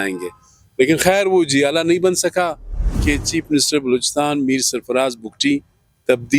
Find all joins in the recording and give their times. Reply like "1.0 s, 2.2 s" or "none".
3.0 s